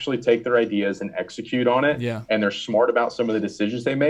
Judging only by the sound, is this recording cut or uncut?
uncut